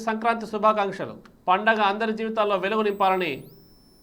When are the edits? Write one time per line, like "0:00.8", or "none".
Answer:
none